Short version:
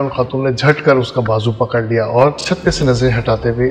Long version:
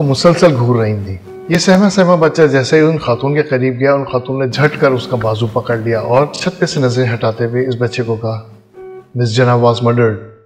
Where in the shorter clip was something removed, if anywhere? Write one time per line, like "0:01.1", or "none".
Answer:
none

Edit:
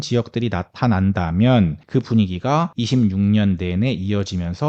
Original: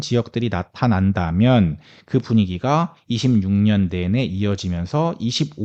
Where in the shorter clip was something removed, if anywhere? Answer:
0:01.8
0:02.8

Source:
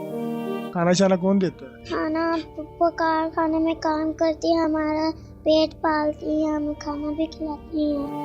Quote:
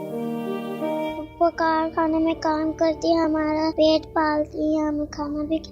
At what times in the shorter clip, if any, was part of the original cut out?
0:00.8
0:03.7

